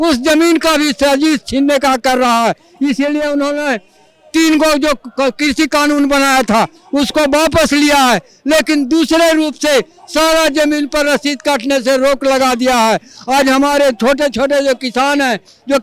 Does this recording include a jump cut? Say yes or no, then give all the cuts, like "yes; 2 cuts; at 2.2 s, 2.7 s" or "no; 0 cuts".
no; 0 cuts